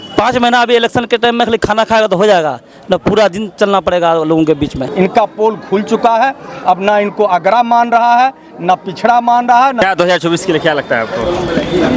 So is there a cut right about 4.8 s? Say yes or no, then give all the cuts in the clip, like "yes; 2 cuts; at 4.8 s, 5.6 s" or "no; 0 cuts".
yes; 2 cuts; at 4.8 s, 9.8 s